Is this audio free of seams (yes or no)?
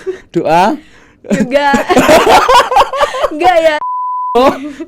no